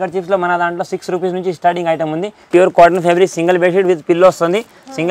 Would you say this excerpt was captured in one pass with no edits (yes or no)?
no